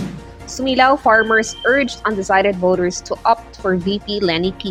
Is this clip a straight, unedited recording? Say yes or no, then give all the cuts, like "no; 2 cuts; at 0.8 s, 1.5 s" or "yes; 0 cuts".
yes; 0 cuts